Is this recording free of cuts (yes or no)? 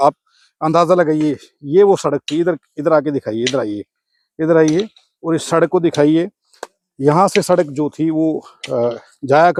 yes